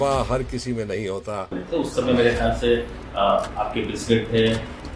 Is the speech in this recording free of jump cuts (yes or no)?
no